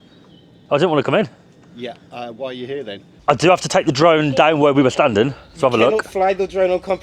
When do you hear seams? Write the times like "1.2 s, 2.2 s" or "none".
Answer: 3.1 s

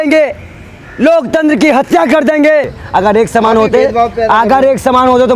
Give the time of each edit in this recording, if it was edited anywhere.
2.8 s

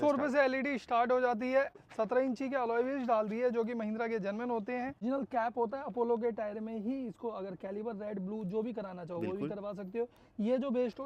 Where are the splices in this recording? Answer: 1.8 s, 5.0 s

